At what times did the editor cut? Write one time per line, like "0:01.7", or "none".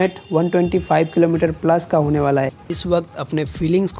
0:02.7